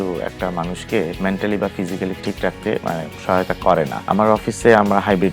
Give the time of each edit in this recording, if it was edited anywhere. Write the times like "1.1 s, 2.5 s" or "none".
1.1 s, 2.2 s, 4.1 s